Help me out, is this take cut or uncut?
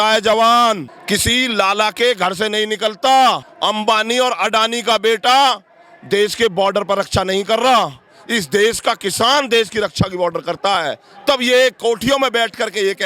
cut